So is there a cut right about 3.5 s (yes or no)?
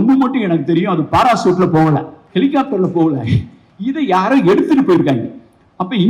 no